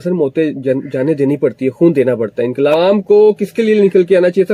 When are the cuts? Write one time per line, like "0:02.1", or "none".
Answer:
0:02.7

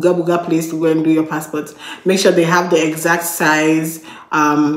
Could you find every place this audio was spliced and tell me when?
none

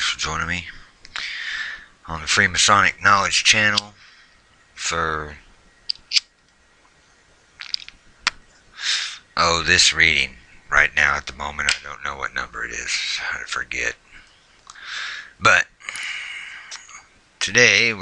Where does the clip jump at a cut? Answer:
none

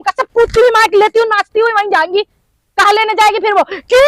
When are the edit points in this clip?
none

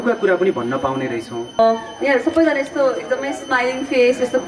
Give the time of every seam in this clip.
0:01.6

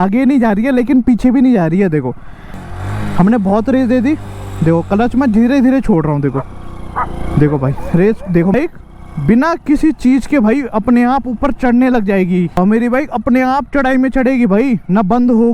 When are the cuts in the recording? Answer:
0:02.6
0:08.6
0:12.5

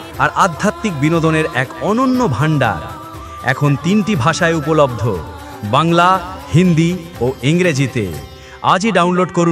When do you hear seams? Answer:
none

